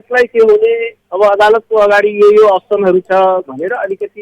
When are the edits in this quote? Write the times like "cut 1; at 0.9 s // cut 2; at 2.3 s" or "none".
cut 1; at 1.0 s